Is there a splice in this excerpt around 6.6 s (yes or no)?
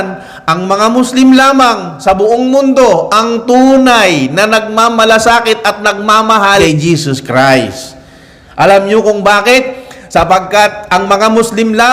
yes